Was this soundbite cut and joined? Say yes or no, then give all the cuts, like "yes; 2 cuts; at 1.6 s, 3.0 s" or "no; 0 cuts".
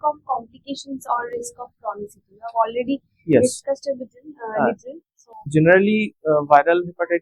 yes; 1 cut; at 5.5 s